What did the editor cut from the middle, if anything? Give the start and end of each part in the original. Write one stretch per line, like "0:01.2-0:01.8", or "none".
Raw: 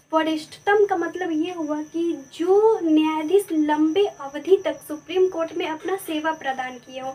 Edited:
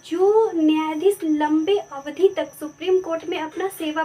none

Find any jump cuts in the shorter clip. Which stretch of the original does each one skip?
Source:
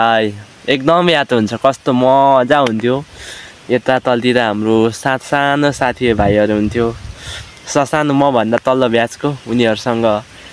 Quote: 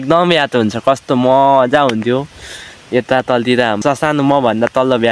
0:04.6-0:07.7

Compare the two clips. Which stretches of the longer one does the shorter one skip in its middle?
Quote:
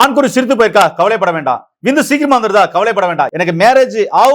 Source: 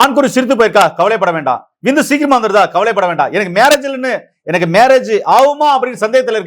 0:03.3-0:04.4

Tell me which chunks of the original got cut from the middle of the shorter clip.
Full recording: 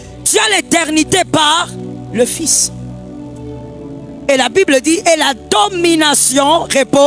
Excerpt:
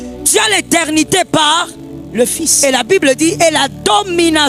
0:02.5-0:04.2

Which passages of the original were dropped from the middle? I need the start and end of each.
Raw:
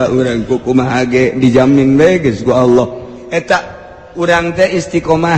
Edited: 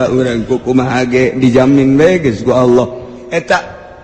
none

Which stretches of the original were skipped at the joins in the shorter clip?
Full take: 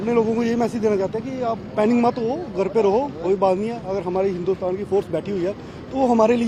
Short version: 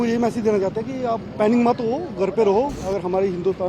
0:03.2-0:03.8

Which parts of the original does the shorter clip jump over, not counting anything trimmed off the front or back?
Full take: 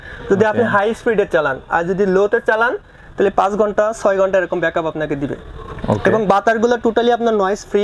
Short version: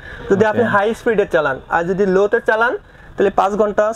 none

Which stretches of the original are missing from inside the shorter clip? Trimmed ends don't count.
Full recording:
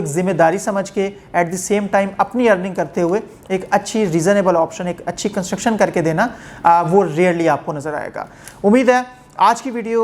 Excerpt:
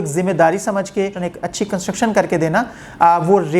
0:01.2-0:04.8

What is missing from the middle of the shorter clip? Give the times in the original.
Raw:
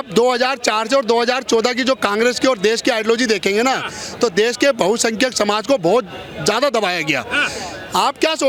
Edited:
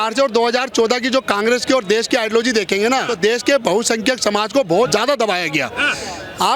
0:03.8-0:04.2
0:06.0-0:06.4

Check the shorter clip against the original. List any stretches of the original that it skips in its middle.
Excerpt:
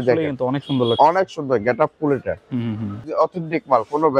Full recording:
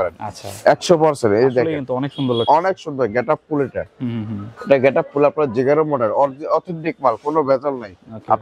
0:04.5-0:06.4

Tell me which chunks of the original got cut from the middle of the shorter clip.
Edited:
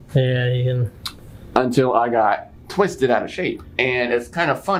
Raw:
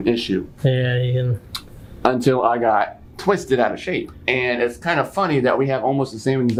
none

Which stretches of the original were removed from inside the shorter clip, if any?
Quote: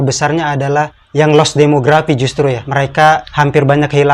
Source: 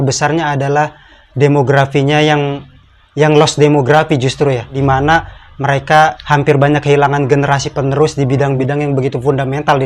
0:01.0-0:03.0
0:04.6-0:05.5

